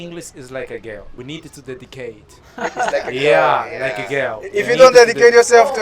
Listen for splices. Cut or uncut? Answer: cut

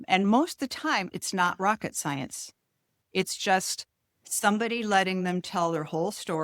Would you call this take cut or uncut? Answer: cut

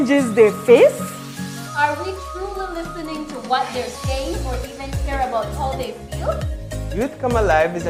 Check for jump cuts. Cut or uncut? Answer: uncut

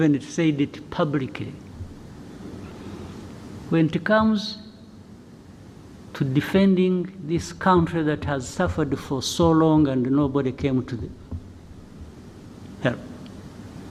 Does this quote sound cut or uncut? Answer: uncut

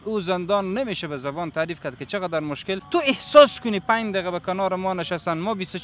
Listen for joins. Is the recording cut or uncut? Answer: cut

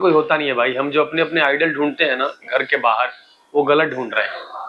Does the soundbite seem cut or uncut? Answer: uncut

